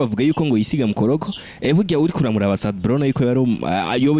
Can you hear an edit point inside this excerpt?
no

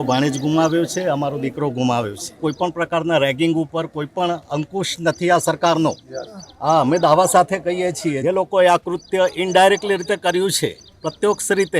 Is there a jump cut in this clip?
yes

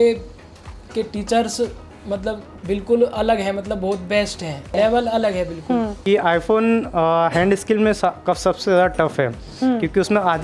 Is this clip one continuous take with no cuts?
no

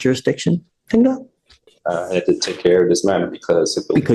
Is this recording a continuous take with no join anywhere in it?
yes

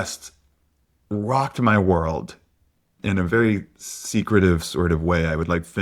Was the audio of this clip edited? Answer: yes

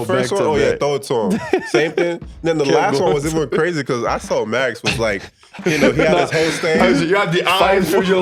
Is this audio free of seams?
yes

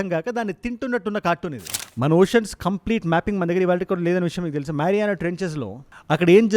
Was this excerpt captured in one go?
no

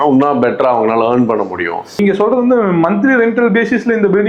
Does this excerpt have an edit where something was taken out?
no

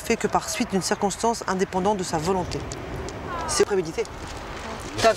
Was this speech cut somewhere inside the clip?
no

